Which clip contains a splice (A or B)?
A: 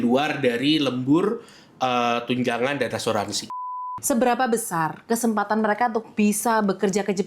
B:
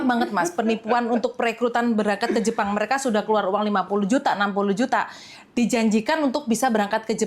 A